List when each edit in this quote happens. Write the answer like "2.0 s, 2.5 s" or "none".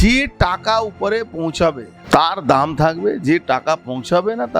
1.9 s